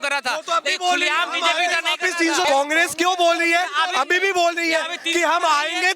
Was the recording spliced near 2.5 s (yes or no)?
yes